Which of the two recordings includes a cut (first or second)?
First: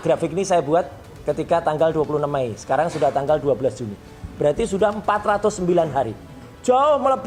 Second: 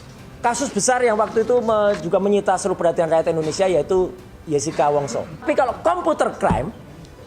second